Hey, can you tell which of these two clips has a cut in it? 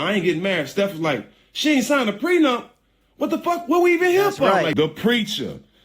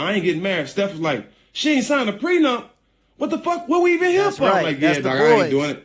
first; 1 cut; at 4.7 s

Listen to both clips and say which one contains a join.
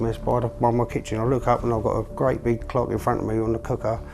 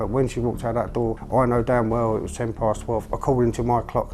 second; 1 cut; at 1.2 s

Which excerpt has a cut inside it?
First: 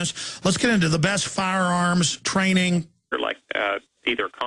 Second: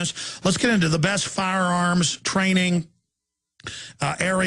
second; 1 cut; at 3.1 s

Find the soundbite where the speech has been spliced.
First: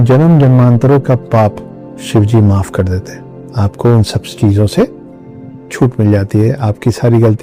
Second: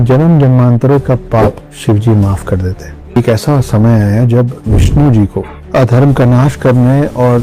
second; 2 cuts; at 1.7 s, 3.2 s

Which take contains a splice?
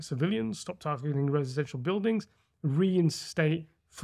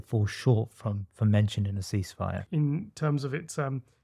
second; 1 cut; at 2.4 s

